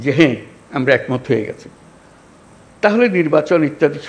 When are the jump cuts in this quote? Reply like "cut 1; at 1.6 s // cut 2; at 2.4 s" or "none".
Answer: none